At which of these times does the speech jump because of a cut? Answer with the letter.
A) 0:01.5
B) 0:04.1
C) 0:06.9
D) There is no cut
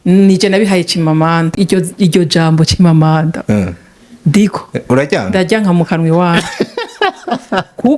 A